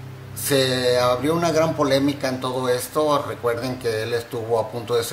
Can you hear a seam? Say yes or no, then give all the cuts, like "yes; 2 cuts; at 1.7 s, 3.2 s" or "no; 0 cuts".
yes; 1 cut; at 3.6 s